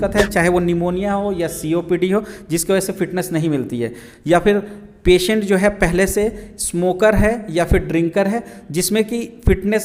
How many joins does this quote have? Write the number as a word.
zero